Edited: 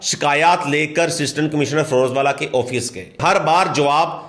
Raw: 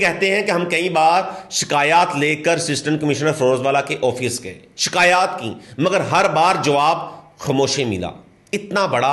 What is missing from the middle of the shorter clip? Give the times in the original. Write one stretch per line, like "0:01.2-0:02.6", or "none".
0:04.7-0:06.1